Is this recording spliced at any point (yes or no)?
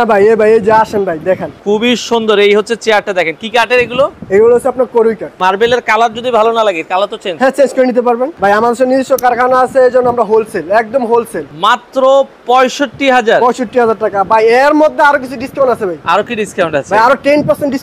yes